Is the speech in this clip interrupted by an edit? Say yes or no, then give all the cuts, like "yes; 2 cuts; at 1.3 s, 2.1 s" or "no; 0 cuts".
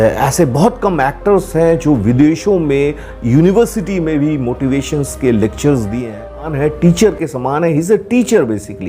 yes; 1 cut; at 6.5 s